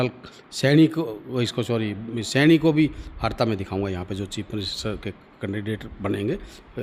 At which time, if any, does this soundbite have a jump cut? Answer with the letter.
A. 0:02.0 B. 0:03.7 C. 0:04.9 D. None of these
D